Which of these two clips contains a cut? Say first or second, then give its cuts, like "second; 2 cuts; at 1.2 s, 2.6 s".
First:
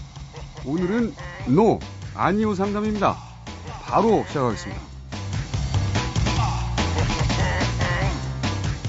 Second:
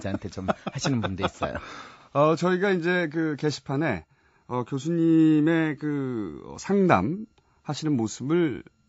second; 1 cut; at 2.9 s